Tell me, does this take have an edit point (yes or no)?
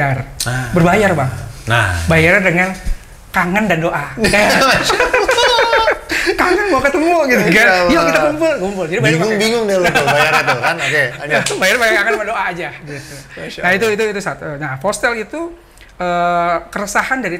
no